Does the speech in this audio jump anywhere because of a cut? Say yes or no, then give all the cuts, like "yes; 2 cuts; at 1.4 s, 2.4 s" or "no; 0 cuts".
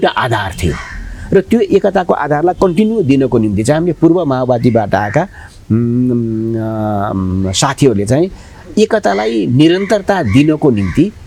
no; 0 cuts